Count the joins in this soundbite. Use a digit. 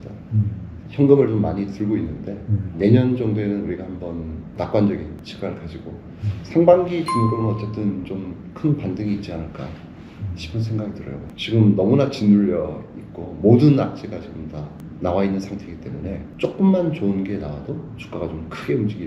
5